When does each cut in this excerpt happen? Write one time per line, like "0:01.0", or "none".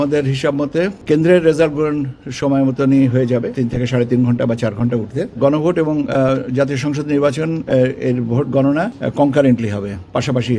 0:01.0
0:03.5
0:05.4
0:09.0